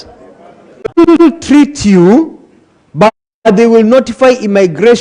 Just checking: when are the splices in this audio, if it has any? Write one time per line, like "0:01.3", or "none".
0:01.1